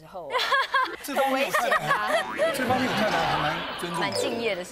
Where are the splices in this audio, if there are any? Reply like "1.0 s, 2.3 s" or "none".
0.9 s